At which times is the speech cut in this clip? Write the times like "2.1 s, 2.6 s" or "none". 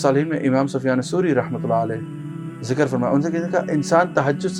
none